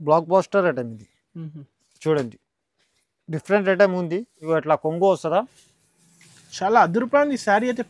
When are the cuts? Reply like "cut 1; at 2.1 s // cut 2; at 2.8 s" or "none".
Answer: cut 1; at 4.3 s